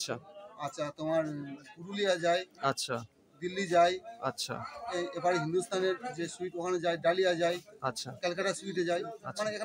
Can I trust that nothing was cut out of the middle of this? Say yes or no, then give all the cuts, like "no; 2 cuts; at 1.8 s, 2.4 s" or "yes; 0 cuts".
yes; 0 cuts